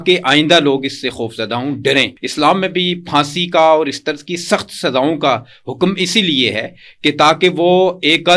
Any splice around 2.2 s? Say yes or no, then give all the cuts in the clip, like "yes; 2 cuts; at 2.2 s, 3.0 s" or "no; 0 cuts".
yes; 1 cut; at 2.2 s